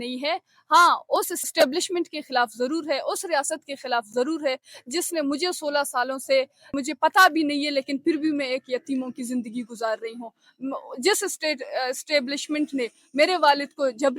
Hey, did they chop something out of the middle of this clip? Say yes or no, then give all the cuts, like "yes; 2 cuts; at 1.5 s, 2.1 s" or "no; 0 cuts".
yes; 2 cuts; at 1.4 s, 6.7 s